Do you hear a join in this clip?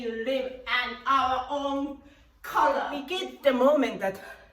yes; 1 cut; at 3.2 s

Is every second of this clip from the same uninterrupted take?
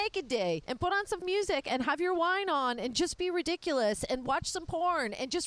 no; 1 cut; at 1.2 s

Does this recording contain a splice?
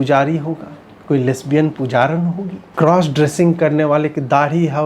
yes; 1 cut; at 2.6 s

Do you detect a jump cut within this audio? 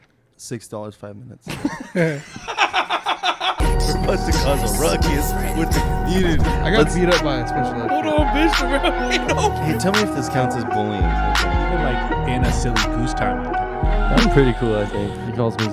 yes; 1 cut; at 3.6 s

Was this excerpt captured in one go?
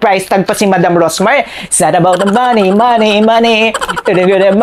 yes; 0 cuts

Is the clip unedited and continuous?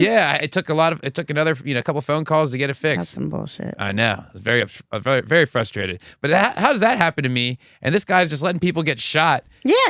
yes; 0 cuts

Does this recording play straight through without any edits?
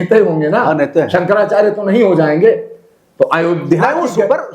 yes; 0 cuts

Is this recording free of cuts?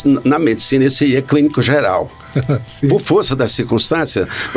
no; 1 cut; at 2.7 s

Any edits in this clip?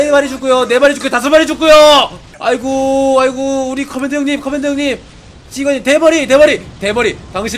yes; 1 cut; at 2.2 s

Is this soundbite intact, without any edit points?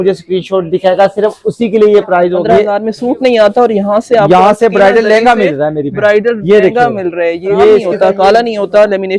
no; 2 cuts; at 2.4 s, 7.9 s

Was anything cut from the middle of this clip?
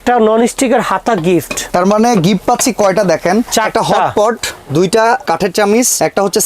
yes; 3 cuts; at 1.6 s, 3.5 s, 5.5 s

